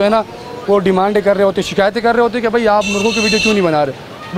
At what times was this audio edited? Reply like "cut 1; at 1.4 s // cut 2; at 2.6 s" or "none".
none